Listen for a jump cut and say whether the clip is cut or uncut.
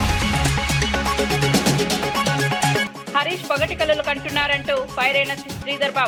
uncut